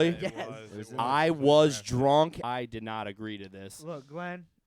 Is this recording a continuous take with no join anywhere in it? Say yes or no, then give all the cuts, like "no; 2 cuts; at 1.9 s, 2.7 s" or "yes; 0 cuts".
no; 1 cut; at 2.4 s